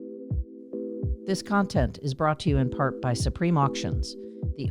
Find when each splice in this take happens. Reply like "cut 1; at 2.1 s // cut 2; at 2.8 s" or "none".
cut 1; at 1.2 s